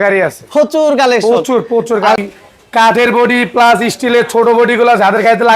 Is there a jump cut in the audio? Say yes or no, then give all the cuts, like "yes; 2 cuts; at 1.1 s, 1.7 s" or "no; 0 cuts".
yes; 1 cut; at 2.2 s